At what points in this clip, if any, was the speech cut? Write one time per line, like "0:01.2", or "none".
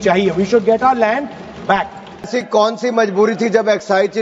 0:02.3